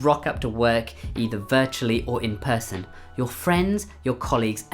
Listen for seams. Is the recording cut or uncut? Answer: uncut